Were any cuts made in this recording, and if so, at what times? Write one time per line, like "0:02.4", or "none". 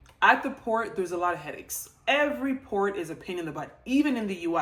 none